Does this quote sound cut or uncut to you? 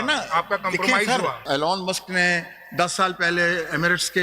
cut